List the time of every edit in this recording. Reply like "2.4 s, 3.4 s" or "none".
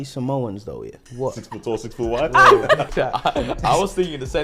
1.0 s, 2.9 s